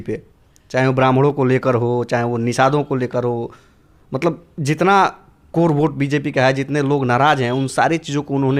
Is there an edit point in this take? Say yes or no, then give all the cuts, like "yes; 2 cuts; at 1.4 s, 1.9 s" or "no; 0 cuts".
no; 0 cuts